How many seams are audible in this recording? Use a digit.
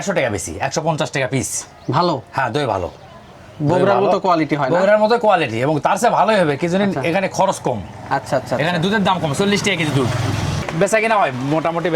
1